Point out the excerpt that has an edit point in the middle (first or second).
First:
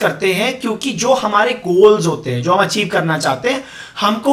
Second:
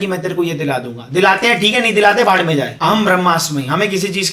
second